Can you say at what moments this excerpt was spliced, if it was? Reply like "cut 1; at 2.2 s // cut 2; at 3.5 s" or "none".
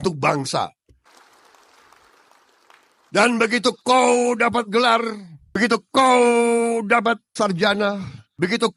none